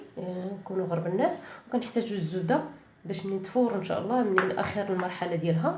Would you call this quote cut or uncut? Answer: uncut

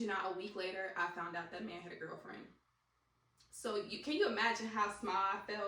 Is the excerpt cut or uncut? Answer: uncut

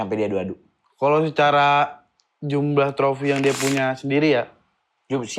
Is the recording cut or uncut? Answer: uncut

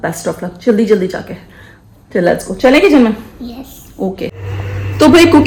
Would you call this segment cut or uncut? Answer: uncut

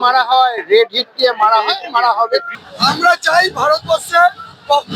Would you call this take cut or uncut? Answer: cut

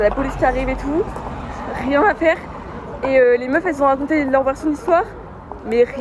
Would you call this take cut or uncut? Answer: uncut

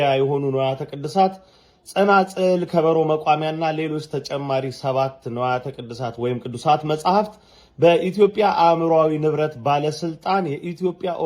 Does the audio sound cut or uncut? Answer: uncut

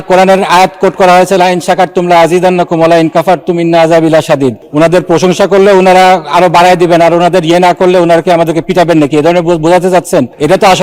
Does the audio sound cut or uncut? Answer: uncut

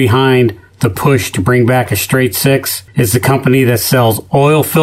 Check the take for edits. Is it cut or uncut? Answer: cut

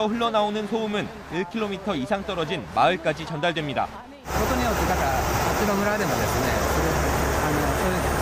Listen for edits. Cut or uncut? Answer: uncut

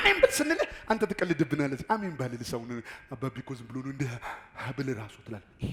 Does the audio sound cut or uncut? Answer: uncut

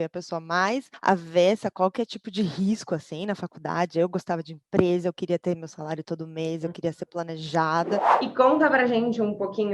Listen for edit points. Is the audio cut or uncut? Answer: cut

